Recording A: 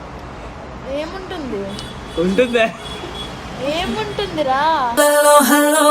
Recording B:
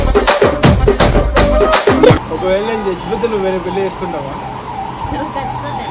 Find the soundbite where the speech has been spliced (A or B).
B